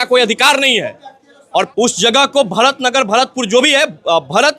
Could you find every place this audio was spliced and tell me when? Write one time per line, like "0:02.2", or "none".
0:01.7